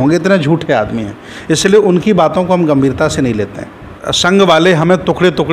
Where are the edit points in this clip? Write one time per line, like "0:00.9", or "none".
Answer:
0:04.1